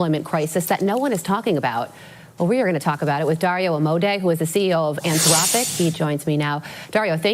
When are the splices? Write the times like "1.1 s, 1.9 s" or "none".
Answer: 6.0 s